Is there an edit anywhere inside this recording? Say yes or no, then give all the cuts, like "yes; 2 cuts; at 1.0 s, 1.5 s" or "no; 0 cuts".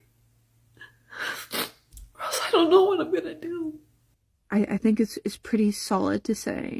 yes; 1 cut; at 3.9 s